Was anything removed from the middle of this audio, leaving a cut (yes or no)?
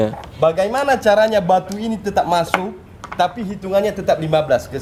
no